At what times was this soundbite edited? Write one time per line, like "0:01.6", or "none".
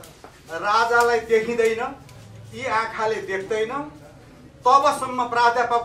none